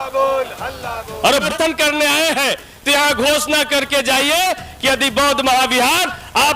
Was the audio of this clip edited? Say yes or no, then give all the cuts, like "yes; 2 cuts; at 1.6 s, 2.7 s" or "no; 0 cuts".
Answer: yes; 1 cut; at 1.5 s